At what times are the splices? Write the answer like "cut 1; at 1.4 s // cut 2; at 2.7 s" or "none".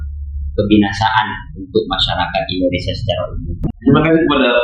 cut 1; at 3.7 s